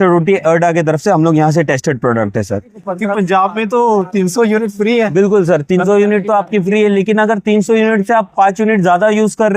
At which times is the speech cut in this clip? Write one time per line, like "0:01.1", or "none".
0:02.7